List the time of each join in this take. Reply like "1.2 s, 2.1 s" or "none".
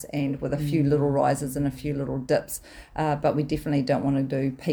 none